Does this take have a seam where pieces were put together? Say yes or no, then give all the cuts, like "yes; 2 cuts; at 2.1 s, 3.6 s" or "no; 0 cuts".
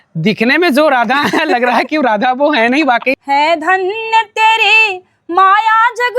yes; 1 cut; at 3.1 s